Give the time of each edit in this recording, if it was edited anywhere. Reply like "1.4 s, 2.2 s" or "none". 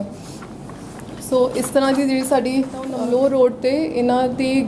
3.0 s